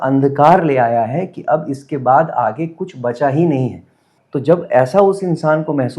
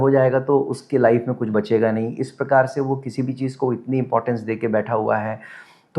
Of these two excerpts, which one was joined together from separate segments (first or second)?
first